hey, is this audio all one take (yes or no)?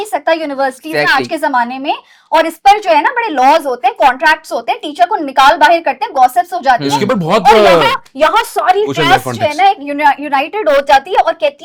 yes